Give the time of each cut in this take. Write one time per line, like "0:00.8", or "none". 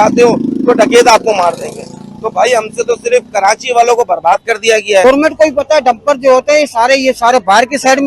0:05.0